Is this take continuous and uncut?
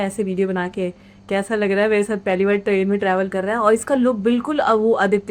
yes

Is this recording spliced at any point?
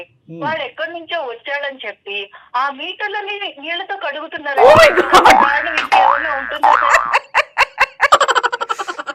no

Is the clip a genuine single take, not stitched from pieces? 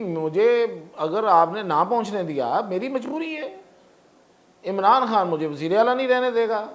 yes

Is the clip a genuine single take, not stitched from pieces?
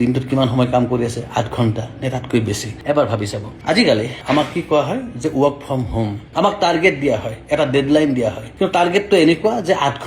no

